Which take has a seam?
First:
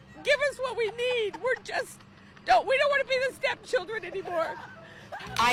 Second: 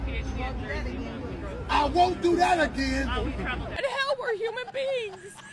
second; 1 cut; at 3.6 s

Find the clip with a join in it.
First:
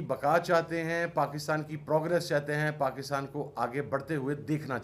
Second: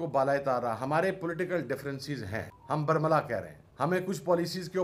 second; 2 cuts; at 2.5 s, 3.6 s

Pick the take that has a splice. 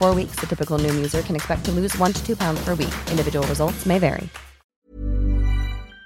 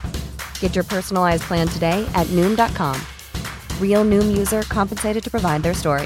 first; 1 cut; at 4.9 s

